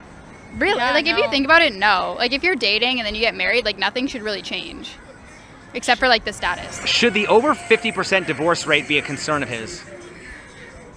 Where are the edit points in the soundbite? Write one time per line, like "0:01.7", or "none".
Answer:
none